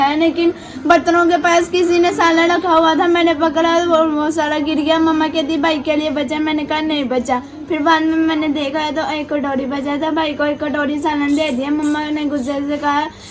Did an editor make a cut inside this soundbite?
no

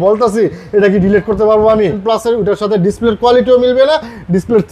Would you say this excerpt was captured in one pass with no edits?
no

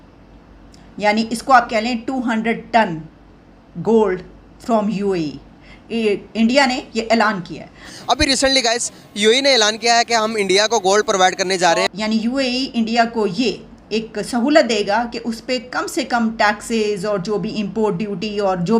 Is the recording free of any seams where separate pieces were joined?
no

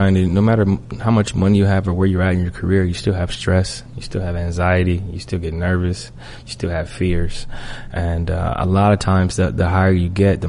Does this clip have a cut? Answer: no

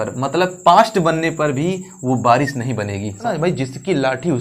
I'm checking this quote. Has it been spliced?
yes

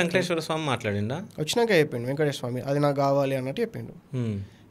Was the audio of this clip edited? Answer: no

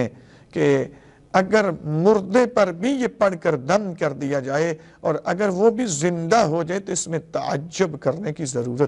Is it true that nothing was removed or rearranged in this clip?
yes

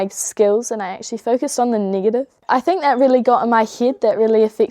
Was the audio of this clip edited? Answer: yes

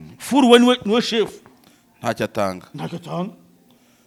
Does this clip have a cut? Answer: no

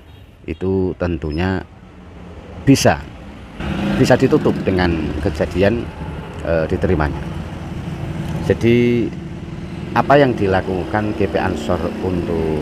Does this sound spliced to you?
no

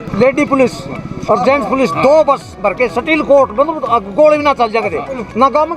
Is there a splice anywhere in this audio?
no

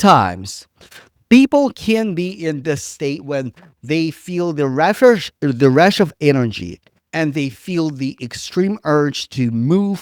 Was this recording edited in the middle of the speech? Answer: no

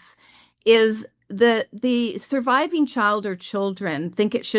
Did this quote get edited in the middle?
no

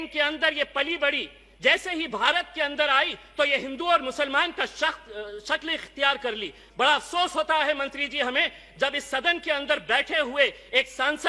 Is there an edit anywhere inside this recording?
no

